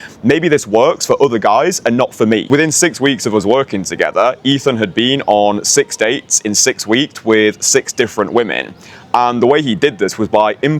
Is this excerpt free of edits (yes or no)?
no